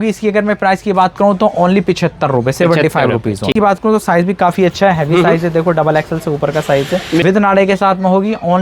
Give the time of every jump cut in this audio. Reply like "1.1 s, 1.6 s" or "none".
3.5 s, 7.2 s